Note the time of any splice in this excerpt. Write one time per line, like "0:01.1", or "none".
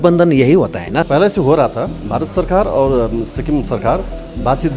0:01.1
0:02.0